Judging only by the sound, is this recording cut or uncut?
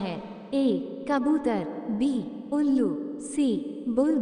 cut